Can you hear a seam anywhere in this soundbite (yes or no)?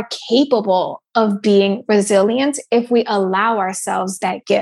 no